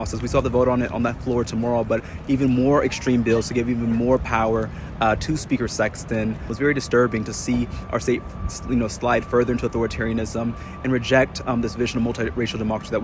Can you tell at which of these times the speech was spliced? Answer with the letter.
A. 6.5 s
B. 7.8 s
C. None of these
A